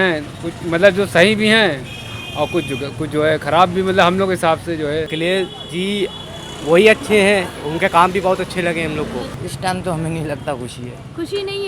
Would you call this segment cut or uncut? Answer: cut